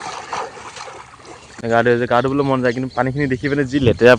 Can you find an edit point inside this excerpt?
yes; 1 cut; at 1.5 s

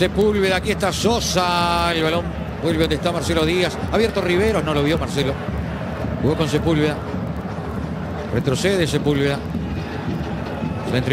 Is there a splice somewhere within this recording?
no; 0 cuts

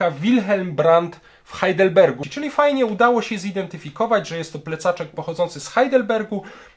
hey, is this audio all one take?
yes; 0 cuts

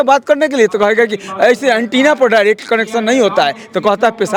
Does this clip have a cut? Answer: no; 0 cuts

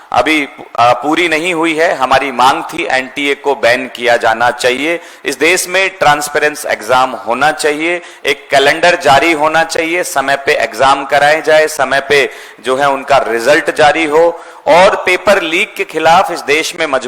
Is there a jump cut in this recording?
no; 0 cuts

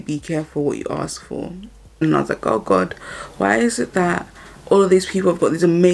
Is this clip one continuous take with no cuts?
no; 1 cut; at 2.0 s

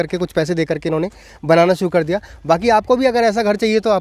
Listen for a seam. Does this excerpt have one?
no; 0 cuts

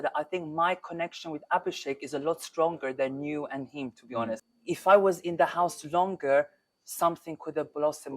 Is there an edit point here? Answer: yes; 1 cut; at 4.5 s

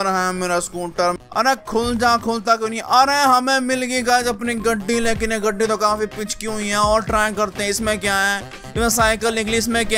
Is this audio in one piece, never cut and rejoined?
no; 1 cut; at 1.2 s

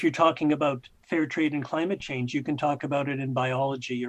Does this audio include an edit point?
yes; 1 cut; at 0.9 s

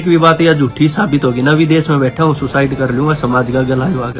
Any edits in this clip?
no; 0 cuts

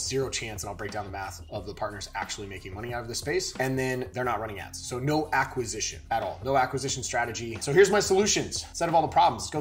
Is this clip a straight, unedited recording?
no; 1 cut; at 7.6 s

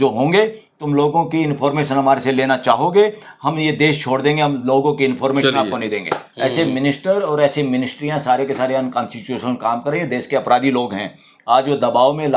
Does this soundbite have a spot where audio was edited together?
yes; 1 cut; at 6.2 s

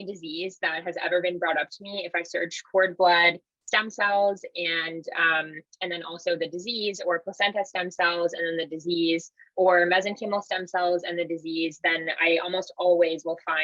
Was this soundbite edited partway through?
no; 0 cuts

